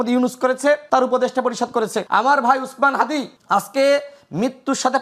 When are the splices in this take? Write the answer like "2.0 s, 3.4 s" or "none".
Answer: 0.8 s, 2.0 s, 3.3 s